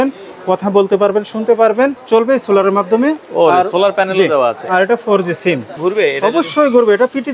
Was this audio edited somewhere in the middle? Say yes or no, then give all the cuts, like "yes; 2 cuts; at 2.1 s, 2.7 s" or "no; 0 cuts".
yes; 2 cuts; at 2.0 s, 5.7 s